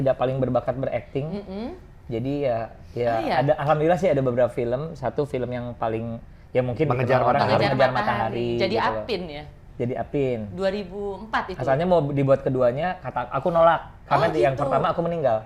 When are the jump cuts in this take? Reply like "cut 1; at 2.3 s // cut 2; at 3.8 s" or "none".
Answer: none